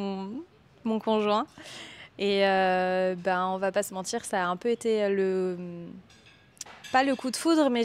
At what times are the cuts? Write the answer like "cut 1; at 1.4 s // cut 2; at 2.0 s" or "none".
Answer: none

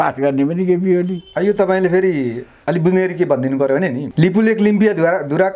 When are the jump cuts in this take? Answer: cut 1; at 4.0 s

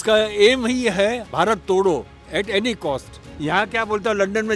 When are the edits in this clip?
cut 1; at 3.2 s

